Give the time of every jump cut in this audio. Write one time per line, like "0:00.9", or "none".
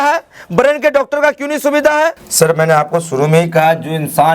0:02.2